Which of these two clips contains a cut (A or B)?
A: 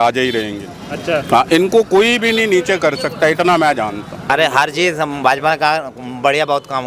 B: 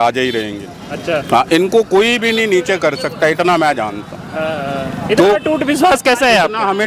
A